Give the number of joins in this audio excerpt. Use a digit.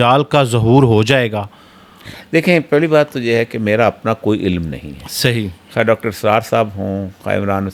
0